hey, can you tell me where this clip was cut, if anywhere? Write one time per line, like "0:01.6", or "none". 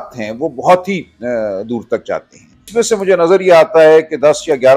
0:02.7